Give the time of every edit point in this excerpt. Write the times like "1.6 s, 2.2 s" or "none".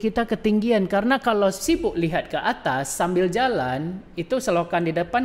none